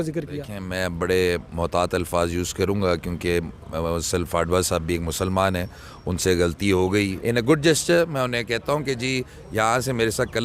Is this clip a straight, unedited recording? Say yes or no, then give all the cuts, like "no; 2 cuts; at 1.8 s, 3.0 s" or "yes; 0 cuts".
no; 1 cut; at 7.2 s